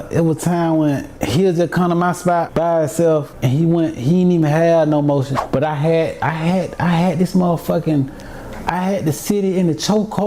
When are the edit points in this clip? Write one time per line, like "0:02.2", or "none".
0:01.1
0:02.5
0:03.3
0:05.4